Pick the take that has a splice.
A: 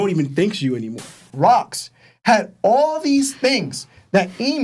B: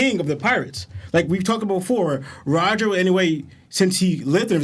A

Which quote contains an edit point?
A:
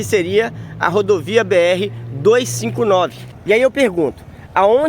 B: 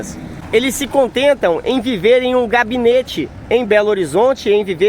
A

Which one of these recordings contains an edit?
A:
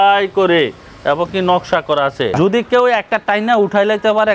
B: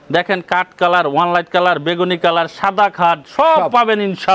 A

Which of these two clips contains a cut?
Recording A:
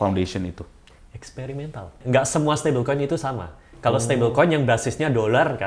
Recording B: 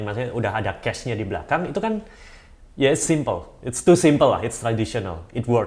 A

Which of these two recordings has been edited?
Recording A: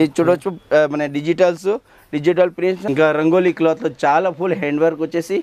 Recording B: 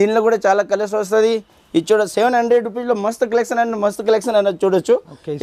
A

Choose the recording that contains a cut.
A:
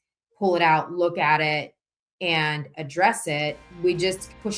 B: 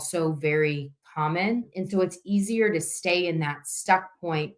A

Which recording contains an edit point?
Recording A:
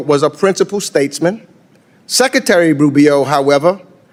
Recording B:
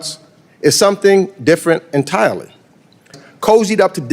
B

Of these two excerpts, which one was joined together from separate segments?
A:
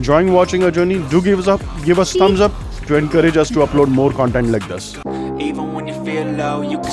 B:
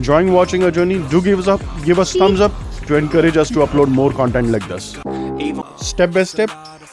B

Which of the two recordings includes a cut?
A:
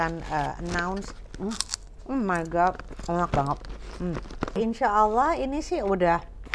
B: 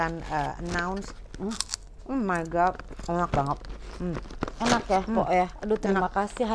A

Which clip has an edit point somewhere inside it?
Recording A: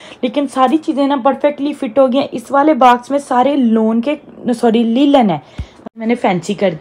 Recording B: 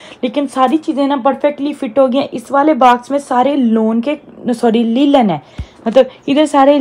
A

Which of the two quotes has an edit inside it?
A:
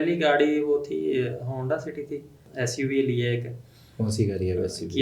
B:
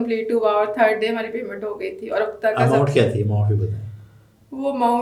A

